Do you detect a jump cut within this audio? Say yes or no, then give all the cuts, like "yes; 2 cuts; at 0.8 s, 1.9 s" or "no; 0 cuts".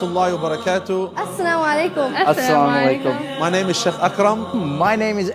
no; 0 cuts